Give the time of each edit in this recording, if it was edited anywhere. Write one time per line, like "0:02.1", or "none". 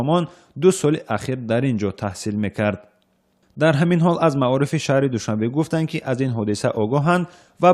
none